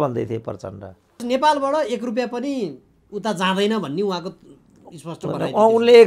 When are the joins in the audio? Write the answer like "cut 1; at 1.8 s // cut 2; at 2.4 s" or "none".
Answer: cut 1; at 1.2 s